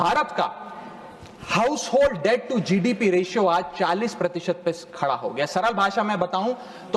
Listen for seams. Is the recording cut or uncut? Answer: uncut